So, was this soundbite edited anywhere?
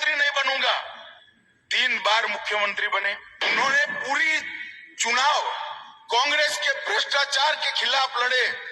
yes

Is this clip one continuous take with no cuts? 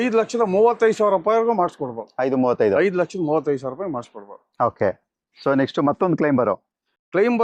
yes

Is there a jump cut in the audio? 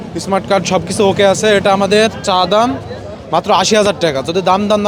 no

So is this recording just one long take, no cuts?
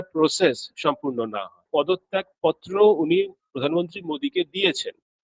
no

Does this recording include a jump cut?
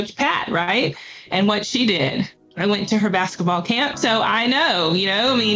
no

